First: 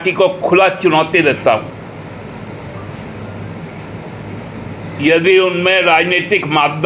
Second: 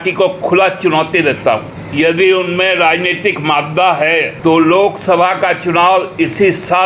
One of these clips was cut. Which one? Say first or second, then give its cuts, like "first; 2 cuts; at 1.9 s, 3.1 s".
second; 2 cuts; at 1.8 s, 4.3 s